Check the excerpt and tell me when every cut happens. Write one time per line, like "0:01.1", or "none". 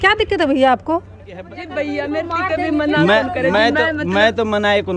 0:01.6